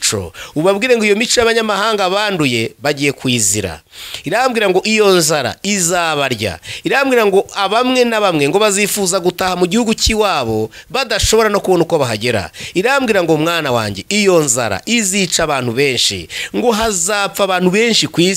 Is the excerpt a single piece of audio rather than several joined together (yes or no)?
yes